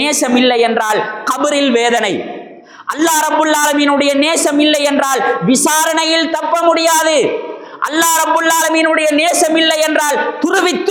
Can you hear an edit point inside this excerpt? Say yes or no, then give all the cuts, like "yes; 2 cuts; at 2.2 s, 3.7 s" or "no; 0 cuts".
no; 0 cuts